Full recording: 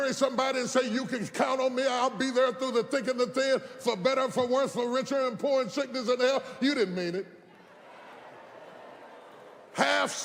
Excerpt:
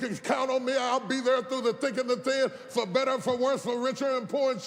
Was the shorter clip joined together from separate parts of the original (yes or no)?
no